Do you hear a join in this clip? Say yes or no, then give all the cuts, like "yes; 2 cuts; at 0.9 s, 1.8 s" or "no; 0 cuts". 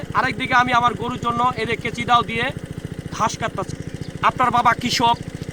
yes; 1 cut; at 3.7 s